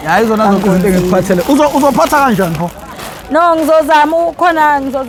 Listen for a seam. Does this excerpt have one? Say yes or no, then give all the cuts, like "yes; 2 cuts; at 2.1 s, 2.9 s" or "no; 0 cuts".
no; 0 cuts